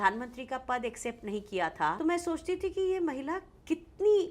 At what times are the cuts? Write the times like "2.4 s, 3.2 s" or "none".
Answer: 2.0 s